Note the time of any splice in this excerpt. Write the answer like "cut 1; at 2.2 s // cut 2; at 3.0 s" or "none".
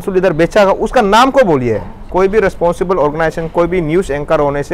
cut 1; at 2.1 s